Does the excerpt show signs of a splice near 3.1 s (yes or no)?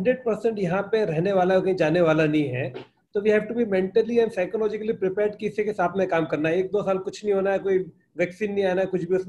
no